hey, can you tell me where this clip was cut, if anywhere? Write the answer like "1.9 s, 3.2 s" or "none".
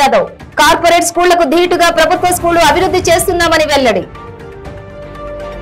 none